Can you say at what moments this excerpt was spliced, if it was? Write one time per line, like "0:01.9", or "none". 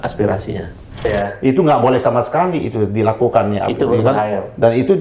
0:01.1